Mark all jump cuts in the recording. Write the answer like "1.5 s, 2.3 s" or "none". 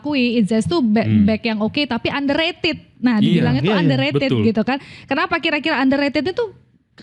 none